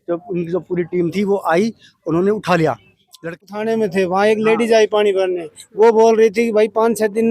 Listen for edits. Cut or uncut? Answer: cut